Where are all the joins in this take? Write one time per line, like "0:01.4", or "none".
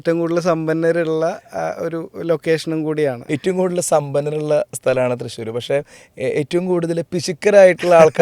0:03.3

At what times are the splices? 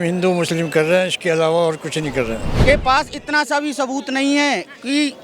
0:02.5

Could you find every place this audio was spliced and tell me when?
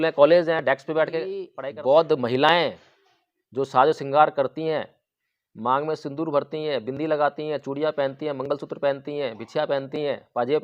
0:01.5

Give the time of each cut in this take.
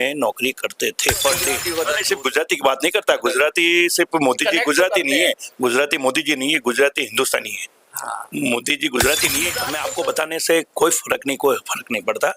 0:01.7
0:09.7

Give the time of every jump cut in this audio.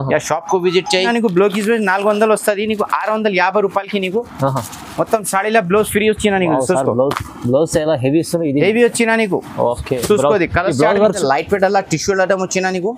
0:01.1
0:11.2

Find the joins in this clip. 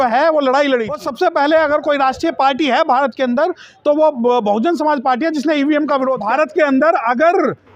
0:01.0
0:06.2

